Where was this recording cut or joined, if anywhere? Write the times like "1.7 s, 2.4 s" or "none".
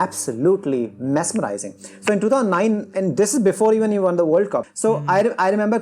4.7 s